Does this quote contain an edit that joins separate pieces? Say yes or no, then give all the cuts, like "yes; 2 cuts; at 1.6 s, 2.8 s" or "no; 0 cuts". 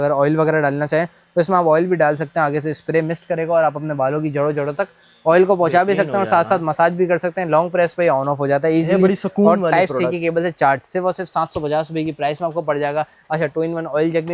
no; 0 cuts